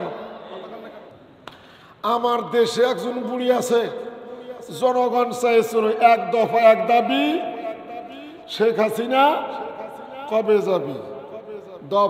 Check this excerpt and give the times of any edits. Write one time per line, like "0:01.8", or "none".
0:01.3